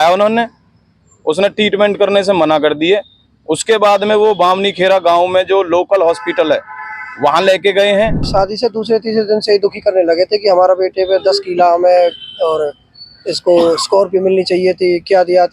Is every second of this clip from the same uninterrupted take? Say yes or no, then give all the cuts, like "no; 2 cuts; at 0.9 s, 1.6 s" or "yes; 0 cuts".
no; 1 cut; at 8.3 s